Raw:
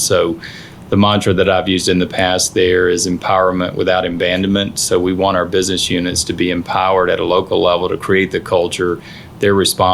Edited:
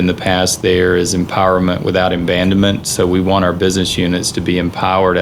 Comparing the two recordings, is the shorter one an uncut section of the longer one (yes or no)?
yes